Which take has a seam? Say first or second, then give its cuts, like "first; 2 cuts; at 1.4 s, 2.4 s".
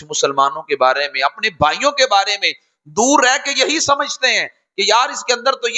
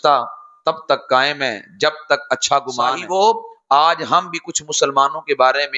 second; 1 cut; at 3.0 s